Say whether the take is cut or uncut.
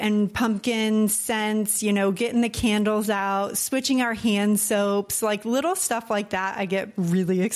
uncut